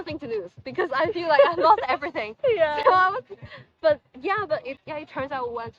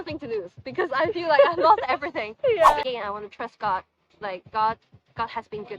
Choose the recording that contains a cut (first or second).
second